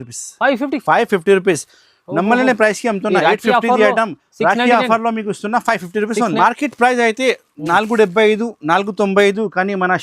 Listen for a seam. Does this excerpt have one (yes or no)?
yes